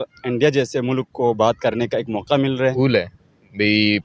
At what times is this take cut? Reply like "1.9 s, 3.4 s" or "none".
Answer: 2.6 s